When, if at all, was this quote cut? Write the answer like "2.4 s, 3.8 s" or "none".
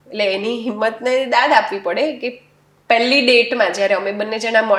none